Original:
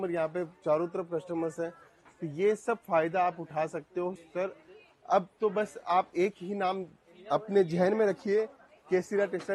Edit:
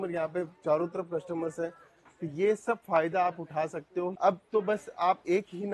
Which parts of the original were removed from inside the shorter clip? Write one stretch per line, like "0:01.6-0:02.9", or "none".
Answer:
0:04.1-0:05.0